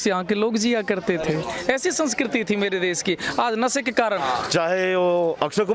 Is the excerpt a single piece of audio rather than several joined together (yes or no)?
no